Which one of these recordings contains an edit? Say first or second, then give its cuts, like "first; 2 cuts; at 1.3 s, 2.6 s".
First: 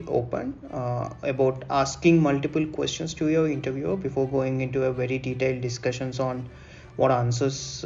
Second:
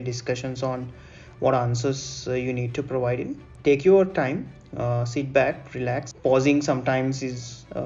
second; 2 cuts; at 3.5 s, 6.1 s